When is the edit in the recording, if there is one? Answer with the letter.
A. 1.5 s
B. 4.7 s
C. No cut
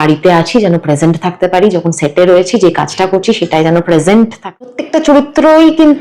B